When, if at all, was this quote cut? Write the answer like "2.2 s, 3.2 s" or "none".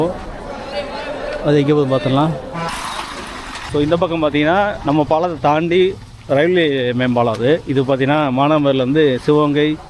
2.7 s